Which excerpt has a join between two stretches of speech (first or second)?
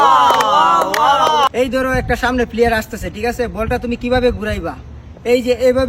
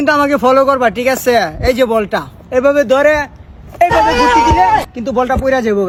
first